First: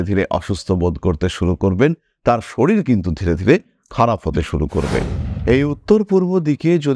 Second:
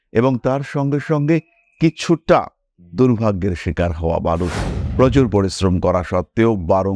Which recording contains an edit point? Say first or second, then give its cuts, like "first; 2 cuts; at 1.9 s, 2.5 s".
first; 1 cut; at 5.2 s